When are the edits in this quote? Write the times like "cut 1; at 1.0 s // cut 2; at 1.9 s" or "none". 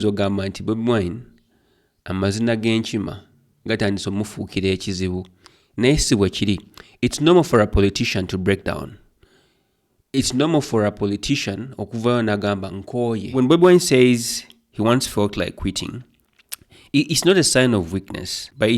cut 1; at 13.3 s